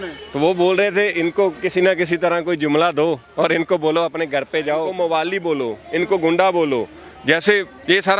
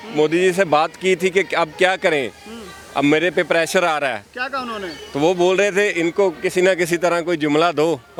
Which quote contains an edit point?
first; 1 cut; at 4.9 s

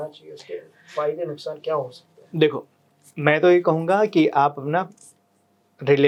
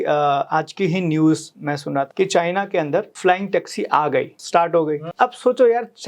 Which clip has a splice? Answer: second; 4 cuts; at 2.1 s, 3.1 s, 4.4 s, 5.1 s

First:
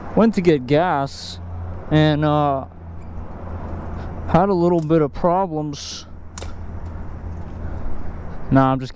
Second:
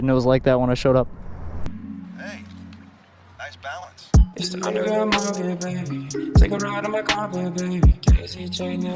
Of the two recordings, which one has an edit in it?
second; 1 cut; at 1.7 s

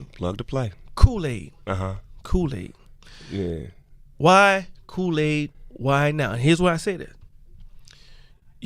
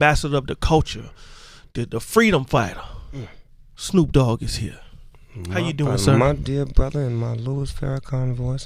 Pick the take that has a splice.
first; 1 cut; at 7.1 s

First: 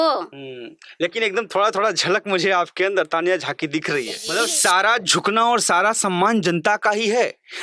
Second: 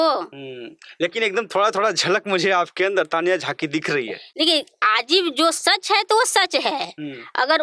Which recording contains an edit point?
first; 1 cut; at 4.2 s

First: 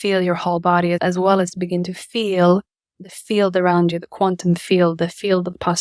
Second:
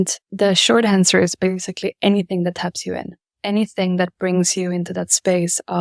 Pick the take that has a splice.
first; 2 cuts; at 1.0 s, 2.9 s

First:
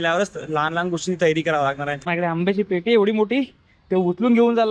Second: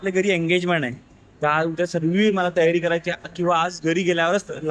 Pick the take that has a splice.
first; 1 cut; at 2.0 s

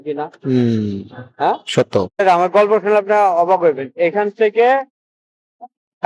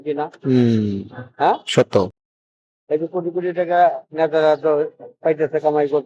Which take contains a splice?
first; 1 cut; at 2.1 s

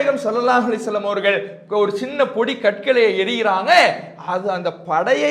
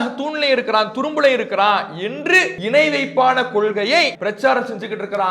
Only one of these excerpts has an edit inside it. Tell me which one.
second; 2 cuts; at 2.6 s, 4.1 s

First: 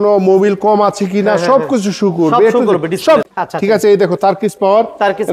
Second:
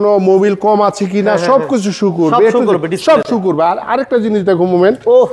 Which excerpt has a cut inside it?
first; 1 cut; at 3.3 s

